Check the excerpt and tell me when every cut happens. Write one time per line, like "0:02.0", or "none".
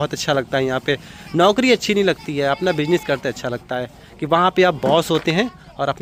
none